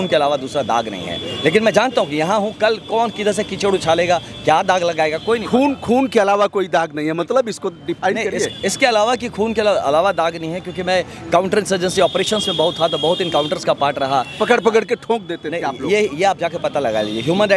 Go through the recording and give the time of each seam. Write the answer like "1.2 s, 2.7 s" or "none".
none

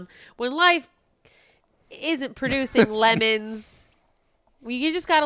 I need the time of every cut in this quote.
none

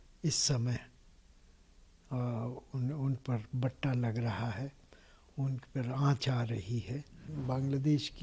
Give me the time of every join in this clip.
7.3 s

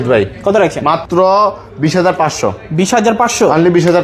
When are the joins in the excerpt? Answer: 1.0 s

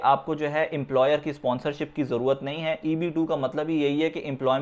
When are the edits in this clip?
none

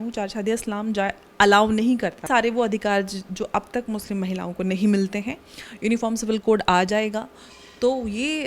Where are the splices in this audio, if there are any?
2.3 s

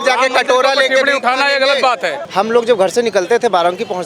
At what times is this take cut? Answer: 2.2 s

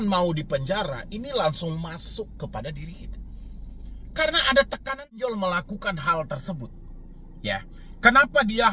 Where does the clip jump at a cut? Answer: 4.8 s

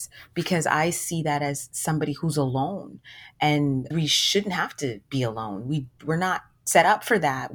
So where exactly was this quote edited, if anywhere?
none

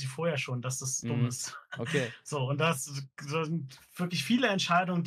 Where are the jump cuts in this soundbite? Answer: none

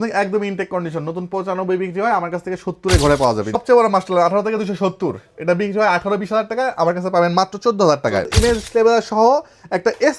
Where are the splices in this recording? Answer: 3.6 s, 8.3 s

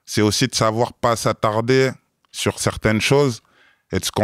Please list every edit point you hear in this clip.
none

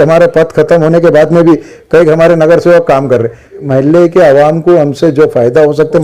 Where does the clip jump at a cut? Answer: 3.6 s

